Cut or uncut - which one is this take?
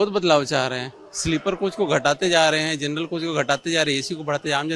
uncut